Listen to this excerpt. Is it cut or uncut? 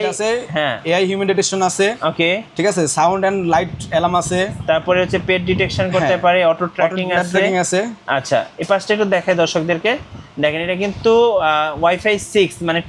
uncut